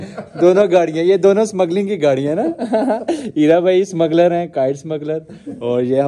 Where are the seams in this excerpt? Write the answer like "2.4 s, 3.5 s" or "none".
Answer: none